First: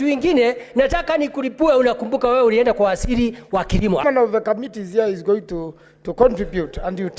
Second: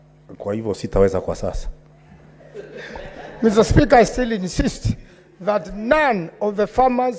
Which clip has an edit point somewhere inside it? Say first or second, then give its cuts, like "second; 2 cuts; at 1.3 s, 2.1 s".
first; 1 cut; at 4.0 s